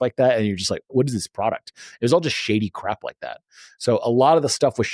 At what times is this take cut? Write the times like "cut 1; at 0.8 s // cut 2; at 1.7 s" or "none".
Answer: cut 1; at 0.9 s